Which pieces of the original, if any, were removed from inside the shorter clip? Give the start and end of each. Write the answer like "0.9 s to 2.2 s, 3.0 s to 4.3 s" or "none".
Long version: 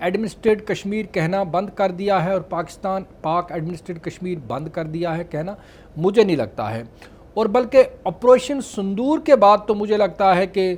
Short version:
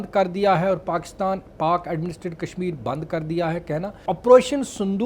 5.7 s to 8.0 s